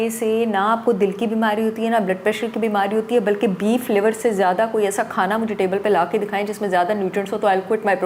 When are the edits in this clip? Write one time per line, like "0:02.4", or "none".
none